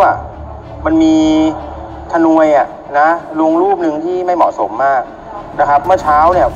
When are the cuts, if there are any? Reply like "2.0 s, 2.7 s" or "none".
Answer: none